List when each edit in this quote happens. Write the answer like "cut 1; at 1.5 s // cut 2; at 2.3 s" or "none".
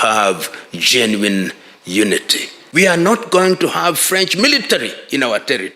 cut 1; at 2.6 s